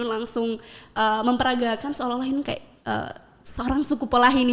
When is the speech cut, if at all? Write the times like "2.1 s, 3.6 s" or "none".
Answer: none